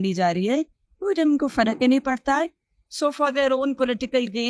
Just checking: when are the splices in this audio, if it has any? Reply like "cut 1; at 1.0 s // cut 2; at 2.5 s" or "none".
none